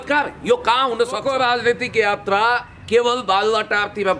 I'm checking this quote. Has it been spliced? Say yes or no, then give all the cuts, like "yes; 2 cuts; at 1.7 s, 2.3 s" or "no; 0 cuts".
yes; 1 cut; at 1.2 s